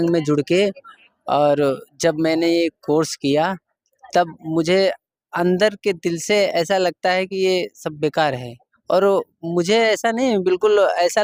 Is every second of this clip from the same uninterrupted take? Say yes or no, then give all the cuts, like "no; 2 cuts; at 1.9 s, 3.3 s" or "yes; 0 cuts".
yes; 0 cuts